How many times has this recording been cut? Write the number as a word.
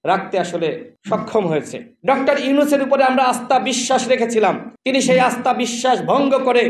one